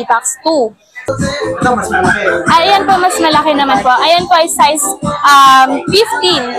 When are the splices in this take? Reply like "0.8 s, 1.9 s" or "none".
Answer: 1.0 s